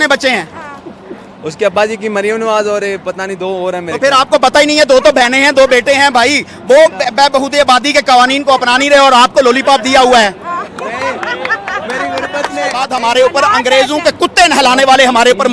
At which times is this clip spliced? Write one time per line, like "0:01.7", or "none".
0:12.8